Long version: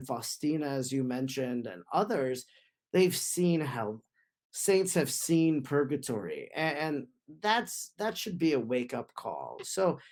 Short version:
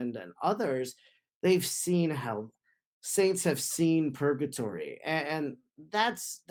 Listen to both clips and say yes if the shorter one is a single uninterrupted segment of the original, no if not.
yes